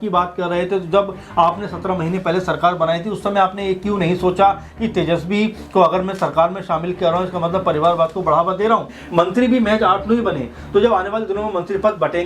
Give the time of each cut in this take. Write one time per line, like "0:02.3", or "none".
0:08.9

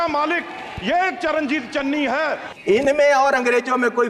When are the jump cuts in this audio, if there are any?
0:02.5

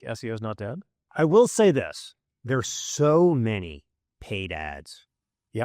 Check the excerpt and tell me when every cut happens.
0:00.9

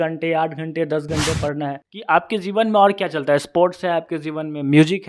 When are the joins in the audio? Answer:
0:01.9

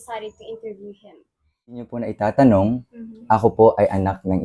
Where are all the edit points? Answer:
0:01.9

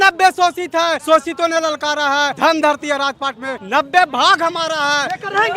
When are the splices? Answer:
0:01.0
0:02.3
0:03.5

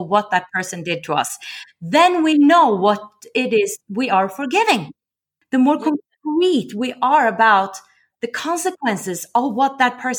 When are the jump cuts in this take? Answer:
0:05.3

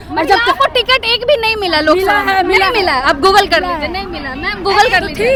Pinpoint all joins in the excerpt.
none

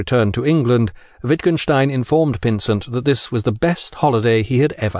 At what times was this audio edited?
0:02.6

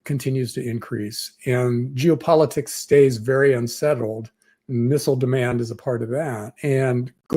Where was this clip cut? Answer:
0:06.5

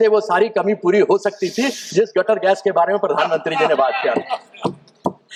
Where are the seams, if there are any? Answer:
none

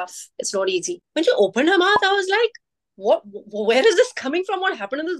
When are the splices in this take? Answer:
0:01.0

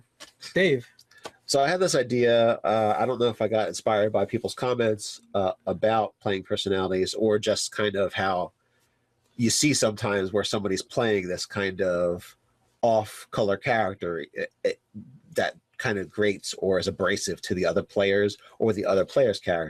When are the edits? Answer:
none

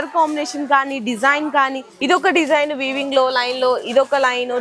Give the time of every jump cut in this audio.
0:01.9

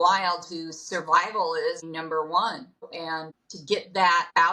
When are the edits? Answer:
0:01.8
0:02.9

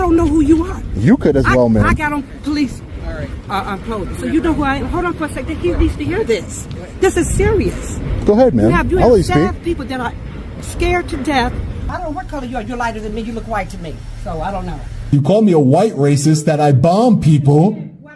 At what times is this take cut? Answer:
0:11.9
0:15.1

